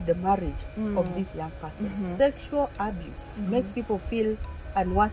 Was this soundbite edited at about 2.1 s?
yes; 1 cut; at 2.1 s

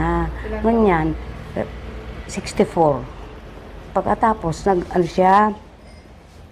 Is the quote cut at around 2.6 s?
no; 0 cuts

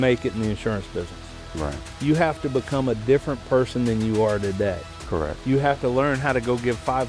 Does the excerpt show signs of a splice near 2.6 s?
no; 0 cuts

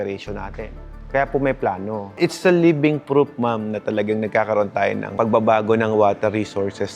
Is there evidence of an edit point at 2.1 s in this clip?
yes; 1 cut; at 2.1 s

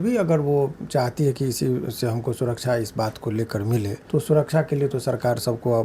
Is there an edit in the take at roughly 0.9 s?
no; 1 cut; at 4.0 s

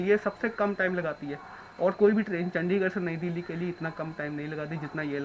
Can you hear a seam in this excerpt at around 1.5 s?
no; 0 cuts

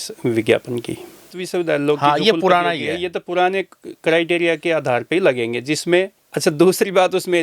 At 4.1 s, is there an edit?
no; 2 cuts; at 1.4 s, 6.2 s

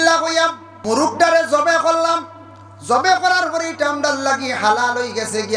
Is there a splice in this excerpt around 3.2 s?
no; 1 cut; at 1.1 s

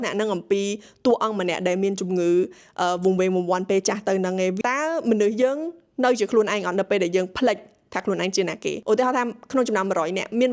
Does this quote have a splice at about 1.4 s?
no; 2 cuts; at 4.6 s, 8.8 s

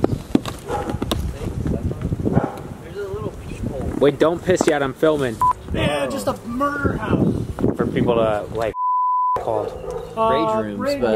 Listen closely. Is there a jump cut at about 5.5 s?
yes; 1 cut; at 5.5 s

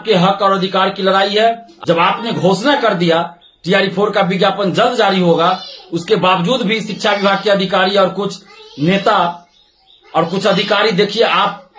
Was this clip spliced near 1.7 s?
yes; 1 cut; at 1.7 s

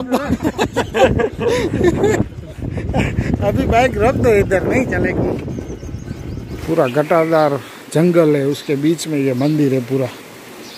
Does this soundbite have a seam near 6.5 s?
yes; 1 cut; at 6.5 s

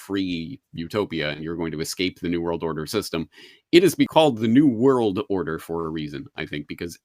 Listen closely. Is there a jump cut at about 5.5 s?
no; 1 cut; at 4.1 s

